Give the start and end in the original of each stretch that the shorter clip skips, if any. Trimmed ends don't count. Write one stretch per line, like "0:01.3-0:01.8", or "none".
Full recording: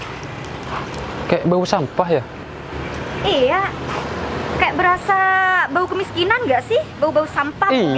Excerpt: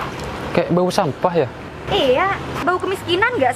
0:02.4-0:03.0
0:03.9-0:05.7